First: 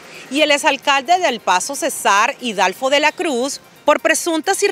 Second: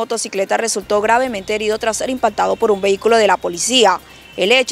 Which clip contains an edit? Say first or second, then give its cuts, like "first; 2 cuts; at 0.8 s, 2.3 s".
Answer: first; 1 cut; at 3.6 s